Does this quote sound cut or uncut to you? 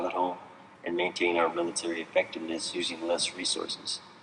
cut